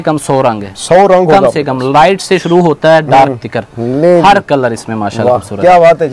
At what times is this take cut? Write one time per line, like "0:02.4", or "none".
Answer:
none